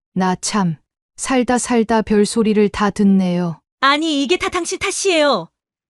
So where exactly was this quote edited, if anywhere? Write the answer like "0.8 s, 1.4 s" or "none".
3.6 s